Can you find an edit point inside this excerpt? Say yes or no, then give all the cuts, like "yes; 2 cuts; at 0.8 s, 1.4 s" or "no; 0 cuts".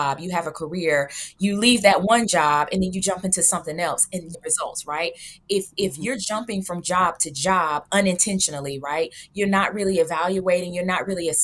yes; 1 cut; at 4.4 s